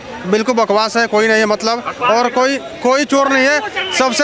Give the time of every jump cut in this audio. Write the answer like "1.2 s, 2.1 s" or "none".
none